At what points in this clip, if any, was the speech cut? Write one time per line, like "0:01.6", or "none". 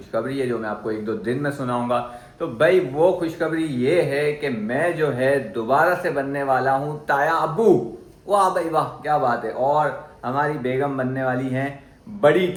none

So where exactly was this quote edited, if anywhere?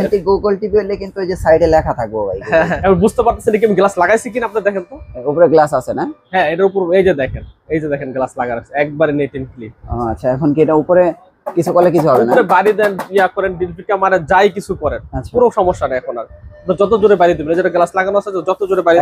0:02.7

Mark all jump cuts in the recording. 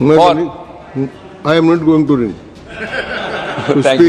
none

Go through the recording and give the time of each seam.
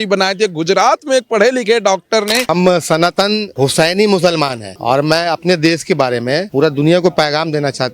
0:02.4
0:03.5
0:04.7
0:06.5

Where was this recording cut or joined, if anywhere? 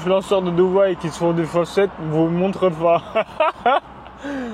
none

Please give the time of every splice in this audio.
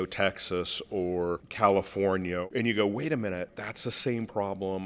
0:01.5
0:02.5
0:03.5

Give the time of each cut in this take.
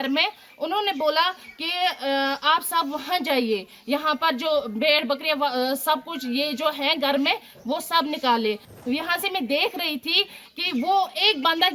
0:08.7

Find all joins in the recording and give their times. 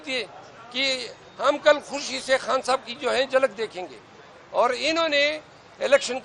none

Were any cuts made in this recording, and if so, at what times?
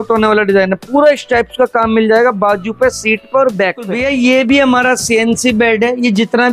0:04.0

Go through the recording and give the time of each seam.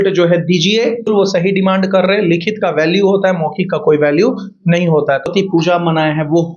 0:01.1
0:05.3

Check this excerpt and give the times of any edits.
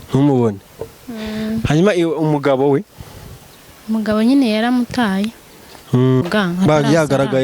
0:06.2

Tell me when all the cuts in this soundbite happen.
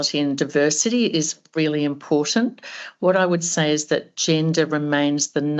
none

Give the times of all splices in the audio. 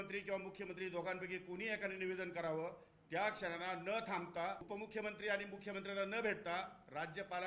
0:04.6

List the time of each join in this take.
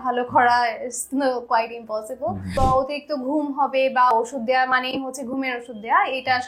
0:02.5
0:04.1

